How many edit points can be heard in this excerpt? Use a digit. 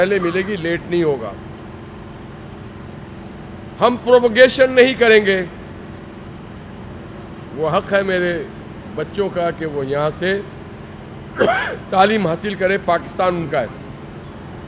0